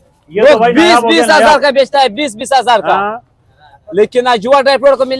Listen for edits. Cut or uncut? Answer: uncut